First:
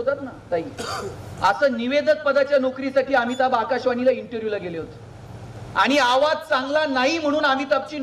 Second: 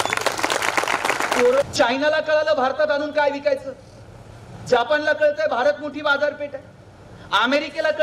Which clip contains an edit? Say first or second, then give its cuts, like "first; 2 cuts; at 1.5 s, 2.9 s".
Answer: second; 1 cut; at 1.6 s